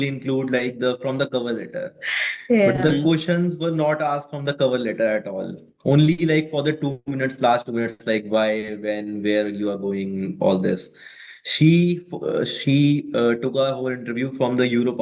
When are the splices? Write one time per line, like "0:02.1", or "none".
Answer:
none